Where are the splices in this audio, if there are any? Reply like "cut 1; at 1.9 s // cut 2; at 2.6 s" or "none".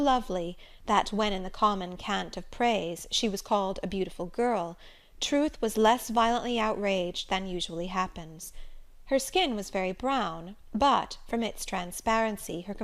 cut 1; at 10.7 s